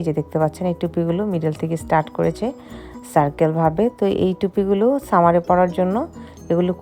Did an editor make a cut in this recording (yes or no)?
no